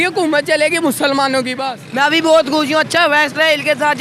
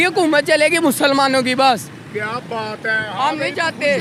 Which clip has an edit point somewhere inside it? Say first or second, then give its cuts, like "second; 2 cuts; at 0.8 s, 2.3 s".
first; 1 cut; at 1.6 s